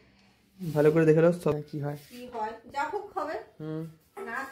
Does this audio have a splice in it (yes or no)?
yes